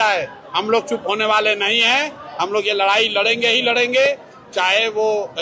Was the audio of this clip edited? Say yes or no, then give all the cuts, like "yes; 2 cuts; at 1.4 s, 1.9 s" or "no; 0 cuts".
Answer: no; 0 cuts